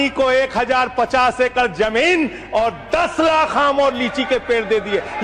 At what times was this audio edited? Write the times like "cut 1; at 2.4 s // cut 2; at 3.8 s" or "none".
none